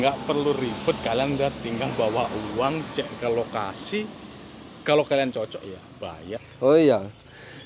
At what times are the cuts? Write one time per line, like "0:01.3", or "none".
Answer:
0:06.5